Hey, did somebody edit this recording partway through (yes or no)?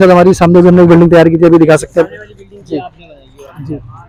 no